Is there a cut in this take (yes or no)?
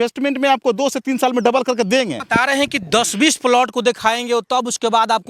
yes